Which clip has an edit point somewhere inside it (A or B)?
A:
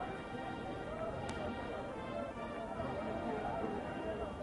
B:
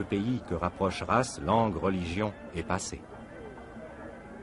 B